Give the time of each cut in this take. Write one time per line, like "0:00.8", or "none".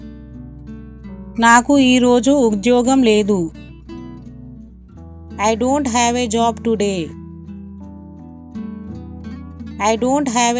0:01.3
0:03.5
0:05.4
0:07.3
0:09.8